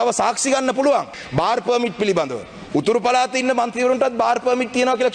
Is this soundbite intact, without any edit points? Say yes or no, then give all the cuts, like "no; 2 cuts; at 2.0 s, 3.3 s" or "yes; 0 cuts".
no; 1 cut; at 1.2 s